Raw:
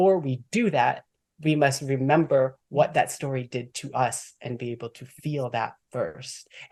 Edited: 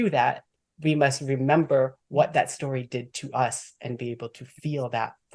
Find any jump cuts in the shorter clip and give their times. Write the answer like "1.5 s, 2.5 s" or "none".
none